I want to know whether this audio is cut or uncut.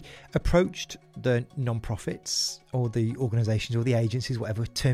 uncut